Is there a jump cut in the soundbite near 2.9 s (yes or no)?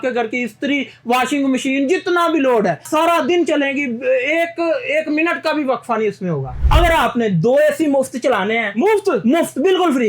yes